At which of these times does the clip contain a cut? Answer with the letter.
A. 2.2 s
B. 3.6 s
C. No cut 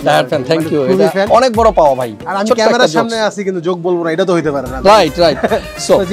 A